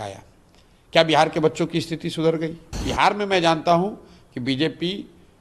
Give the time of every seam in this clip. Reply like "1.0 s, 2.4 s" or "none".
2.8 s